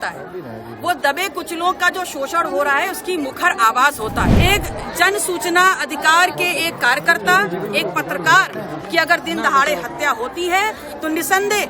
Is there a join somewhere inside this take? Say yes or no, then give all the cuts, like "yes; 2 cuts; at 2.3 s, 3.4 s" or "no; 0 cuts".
yes; 1 cut; at 4.4 s